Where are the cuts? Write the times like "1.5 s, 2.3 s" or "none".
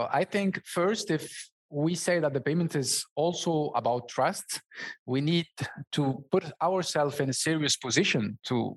none

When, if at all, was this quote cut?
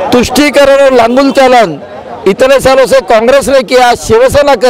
none

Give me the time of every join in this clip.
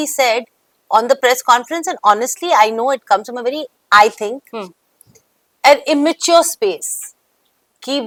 none

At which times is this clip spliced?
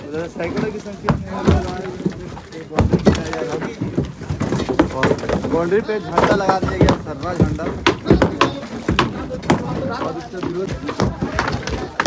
10.7 s

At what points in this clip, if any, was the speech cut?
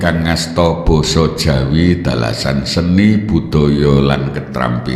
none

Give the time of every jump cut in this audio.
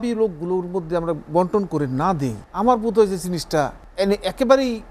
2.4 s, 3.8 s

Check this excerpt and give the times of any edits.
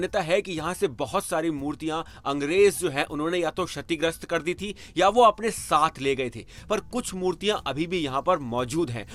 none

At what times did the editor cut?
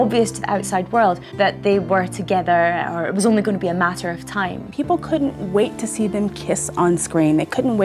1.3 s, 4.6 s

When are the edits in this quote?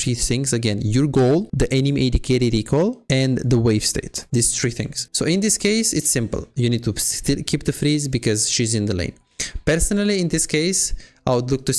1.5 s, 4.2 s, 5.0 s

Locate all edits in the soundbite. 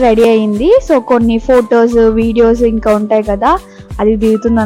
none

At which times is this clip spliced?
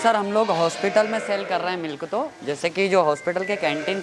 none

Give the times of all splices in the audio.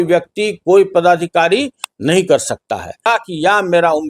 3.1 s

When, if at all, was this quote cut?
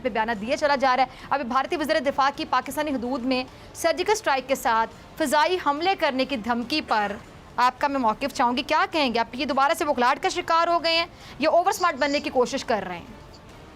none

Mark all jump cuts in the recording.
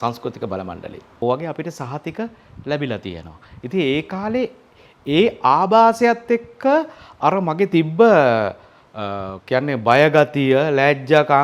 1.0 s

